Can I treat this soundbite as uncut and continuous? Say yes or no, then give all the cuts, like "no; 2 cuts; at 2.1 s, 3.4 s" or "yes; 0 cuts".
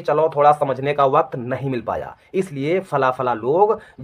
yes; 0 cuts